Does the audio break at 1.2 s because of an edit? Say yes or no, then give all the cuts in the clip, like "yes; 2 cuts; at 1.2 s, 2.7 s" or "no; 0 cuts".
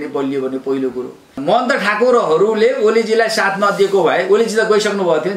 yes; 1 cut; at 1.2 s